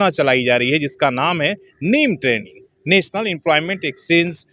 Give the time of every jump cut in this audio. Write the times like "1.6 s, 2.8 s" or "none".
none